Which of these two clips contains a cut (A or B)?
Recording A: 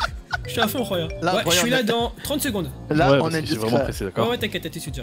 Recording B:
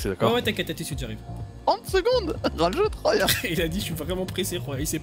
A